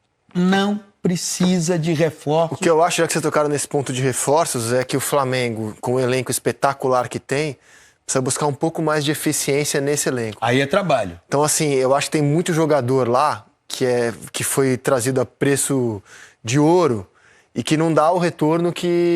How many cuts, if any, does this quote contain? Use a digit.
0